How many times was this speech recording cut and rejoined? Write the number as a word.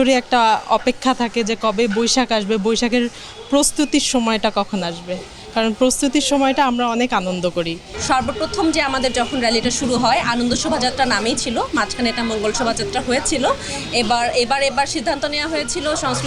one